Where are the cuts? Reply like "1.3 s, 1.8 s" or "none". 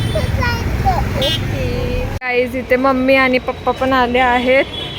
2.2 s